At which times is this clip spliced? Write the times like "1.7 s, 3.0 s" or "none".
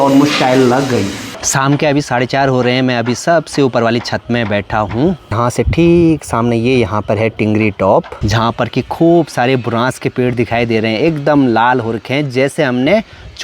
none